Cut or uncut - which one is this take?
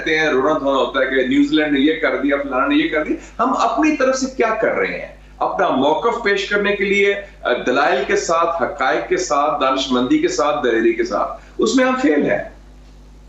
uncut